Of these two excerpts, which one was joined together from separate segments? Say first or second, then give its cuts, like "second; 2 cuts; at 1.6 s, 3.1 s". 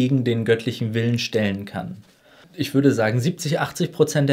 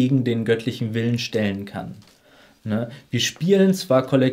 first; 1 cut; at 2.4 s